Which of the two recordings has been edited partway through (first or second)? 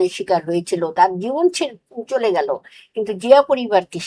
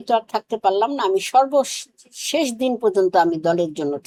first